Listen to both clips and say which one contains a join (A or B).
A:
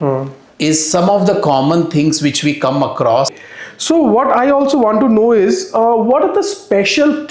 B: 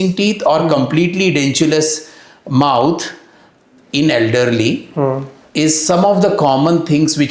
A